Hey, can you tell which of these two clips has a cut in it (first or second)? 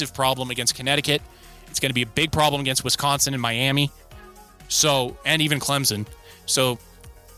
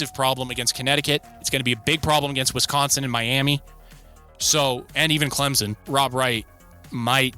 second